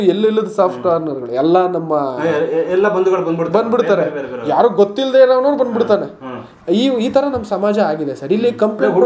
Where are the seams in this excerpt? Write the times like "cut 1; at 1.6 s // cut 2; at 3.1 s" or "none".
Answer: none